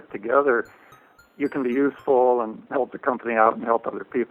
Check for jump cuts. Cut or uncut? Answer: uncut